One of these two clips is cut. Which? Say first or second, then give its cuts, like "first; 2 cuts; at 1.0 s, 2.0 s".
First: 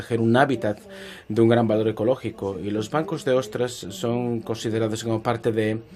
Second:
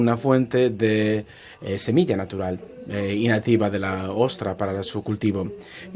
second; 1 cut; at 1.3 s